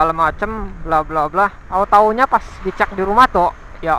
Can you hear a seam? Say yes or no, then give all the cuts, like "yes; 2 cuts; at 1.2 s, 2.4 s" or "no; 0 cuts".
yes; 1 cut; at 1.6 s